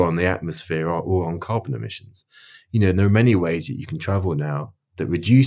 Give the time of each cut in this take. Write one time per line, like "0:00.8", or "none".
0:02.6